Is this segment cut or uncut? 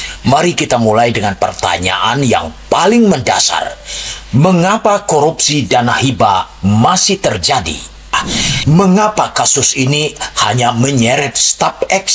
cut